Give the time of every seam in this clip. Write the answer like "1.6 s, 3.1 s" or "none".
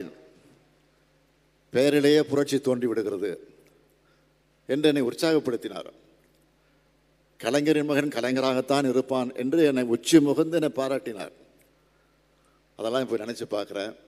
none